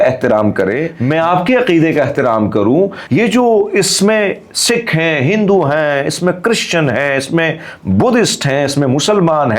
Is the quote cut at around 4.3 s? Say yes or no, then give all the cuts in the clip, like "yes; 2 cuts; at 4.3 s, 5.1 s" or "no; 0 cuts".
no; 2 cuts; at 0.9 s, 3.0 s